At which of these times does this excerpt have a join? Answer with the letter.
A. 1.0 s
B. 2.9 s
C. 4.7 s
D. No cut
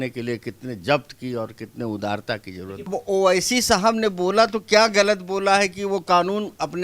B